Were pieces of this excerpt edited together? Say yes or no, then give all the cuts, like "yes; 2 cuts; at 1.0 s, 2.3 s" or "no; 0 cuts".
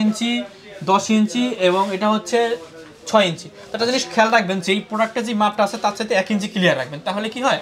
no; 0 cuts